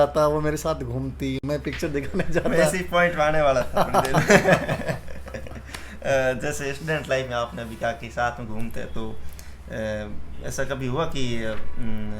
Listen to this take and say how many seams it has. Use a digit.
0